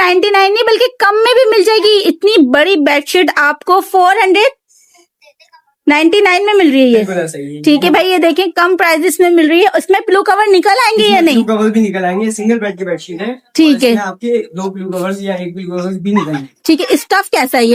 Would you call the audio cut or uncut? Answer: uncut